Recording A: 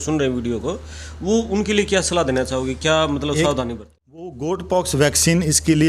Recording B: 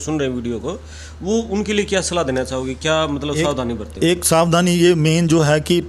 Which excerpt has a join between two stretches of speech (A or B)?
A